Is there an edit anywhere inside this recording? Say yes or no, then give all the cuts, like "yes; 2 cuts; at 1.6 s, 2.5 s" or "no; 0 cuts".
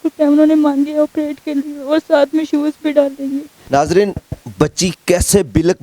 yes; 1 cut; at 3.5 s